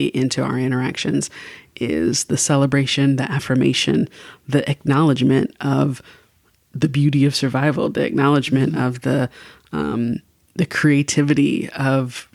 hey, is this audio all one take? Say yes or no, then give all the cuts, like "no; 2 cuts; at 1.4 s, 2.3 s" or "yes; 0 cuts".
yes; 0 cuts